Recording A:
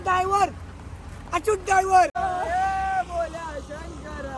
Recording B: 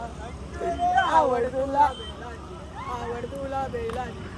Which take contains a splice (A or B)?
A